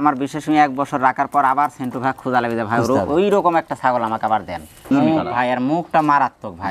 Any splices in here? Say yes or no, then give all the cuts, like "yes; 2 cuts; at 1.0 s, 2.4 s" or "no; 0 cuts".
yes; 1 cut; at 4.9 s